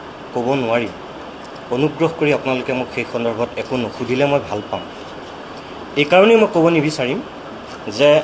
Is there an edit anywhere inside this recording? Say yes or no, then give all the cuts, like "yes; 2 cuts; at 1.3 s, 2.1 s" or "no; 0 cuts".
no; 0 cuts